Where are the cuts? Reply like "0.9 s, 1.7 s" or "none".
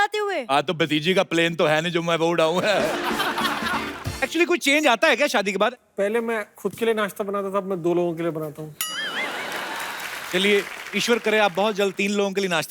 3.9 s, 5.7 s, 10.3 s